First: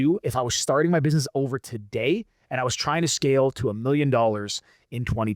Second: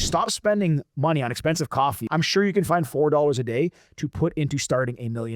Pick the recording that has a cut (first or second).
second